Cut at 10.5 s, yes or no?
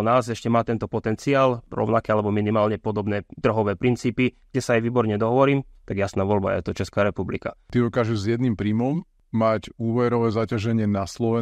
no